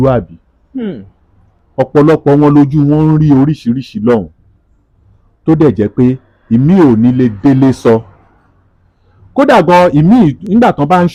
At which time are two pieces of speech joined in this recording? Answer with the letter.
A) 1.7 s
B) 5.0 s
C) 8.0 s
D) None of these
D